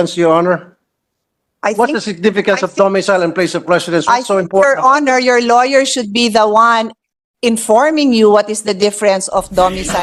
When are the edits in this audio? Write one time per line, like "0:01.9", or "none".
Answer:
none